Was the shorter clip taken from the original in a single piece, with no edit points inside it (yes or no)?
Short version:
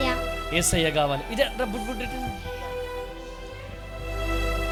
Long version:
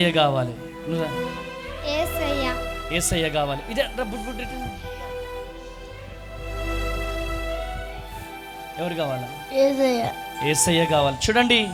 yes